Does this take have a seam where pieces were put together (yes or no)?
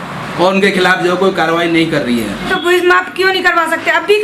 yes